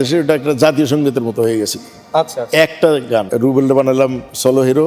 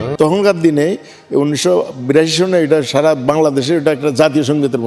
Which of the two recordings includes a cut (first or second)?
first